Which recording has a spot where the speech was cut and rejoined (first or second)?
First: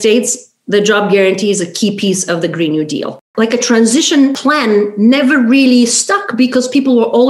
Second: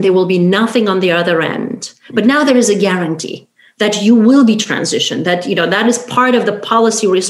first